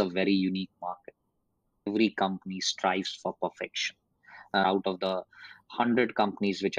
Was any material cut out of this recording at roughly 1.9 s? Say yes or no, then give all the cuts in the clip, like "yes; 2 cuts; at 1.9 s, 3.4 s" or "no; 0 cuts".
yes; 2 cuts; at 1.9 s, 4.6 s